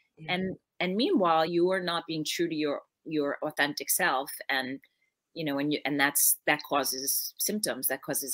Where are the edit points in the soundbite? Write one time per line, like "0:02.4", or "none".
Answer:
0:01.5